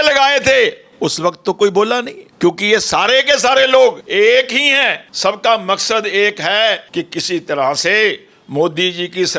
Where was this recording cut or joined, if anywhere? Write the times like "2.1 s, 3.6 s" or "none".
2.2 s, 4.0 s, 5.0 s, 6.8 s